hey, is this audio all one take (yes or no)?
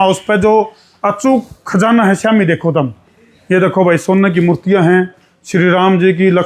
yes